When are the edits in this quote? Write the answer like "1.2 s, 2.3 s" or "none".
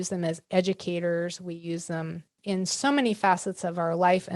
2.4 s